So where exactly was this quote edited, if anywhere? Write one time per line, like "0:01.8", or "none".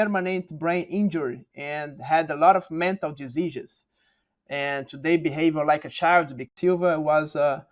0:06.5